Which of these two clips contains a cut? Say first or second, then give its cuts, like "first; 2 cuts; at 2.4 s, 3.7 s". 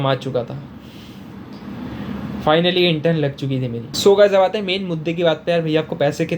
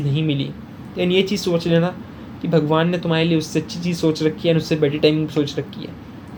first; 1 cut; at 3.9 s